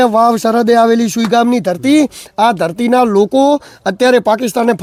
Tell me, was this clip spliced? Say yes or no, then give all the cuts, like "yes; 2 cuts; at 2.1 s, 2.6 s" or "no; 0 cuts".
no; 0 cuts